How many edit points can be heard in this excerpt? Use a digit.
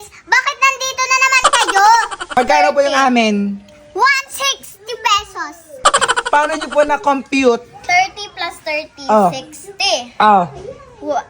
1